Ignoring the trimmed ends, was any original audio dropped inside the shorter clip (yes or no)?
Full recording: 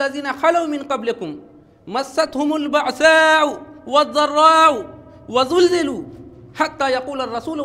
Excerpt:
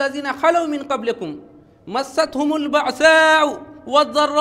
no